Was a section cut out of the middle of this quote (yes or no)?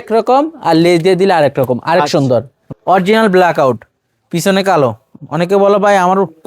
yes